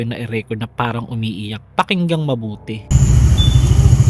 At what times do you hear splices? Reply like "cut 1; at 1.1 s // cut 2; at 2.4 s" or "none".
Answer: cut 1; at 2.9 s